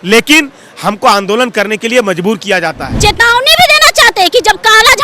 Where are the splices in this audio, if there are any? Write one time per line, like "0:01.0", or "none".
0:02.9